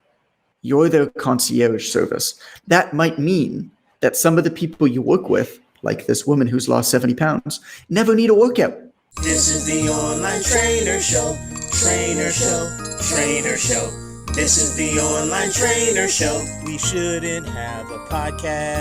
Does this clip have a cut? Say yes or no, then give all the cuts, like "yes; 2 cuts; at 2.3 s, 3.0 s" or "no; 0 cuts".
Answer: yes; 1 cut; at 9.0 s